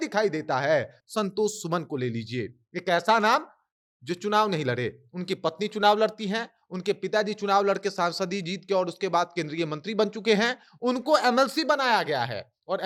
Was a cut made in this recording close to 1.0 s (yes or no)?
no